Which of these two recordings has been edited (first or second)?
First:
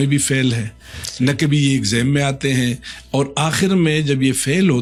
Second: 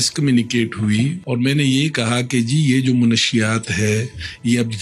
second